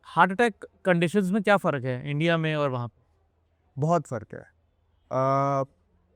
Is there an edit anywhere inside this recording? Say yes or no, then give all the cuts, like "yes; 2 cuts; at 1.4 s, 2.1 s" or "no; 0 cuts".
no; 0 cuts